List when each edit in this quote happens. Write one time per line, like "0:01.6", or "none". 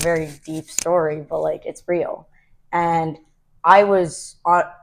none